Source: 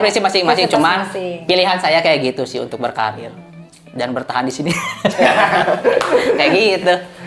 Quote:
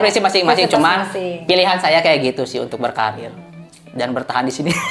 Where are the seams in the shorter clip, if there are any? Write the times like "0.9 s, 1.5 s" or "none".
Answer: none